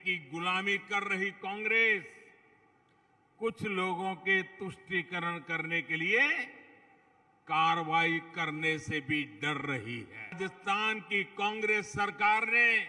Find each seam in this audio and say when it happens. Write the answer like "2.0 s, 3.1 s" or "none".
10.4 s